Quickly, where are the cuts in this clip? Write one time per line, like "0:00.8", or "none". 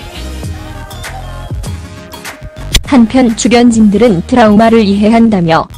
none